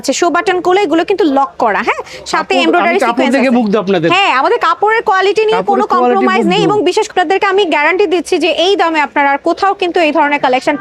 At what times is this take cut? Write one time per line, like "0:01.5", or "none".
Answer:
0:07.1